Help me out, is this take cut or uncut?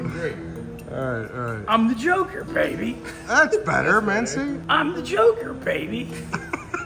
cut